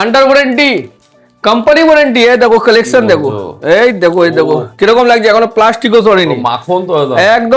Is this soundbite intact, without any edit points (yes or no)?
yes